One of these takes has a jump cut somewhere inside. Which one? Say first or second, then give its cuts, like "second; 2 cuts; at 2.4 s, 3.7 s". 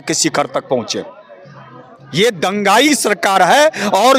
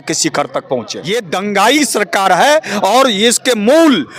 second; 1 cut; at 1.0 s